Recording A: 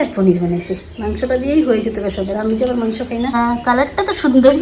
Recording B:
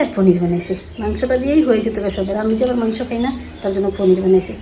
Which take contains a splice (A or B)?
A